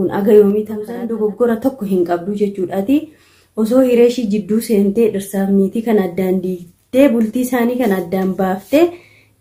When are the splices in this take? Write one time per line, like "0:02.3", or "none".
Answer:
0:01.0